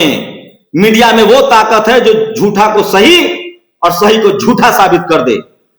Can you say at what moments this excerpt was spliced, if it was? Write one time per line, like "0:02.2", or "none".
none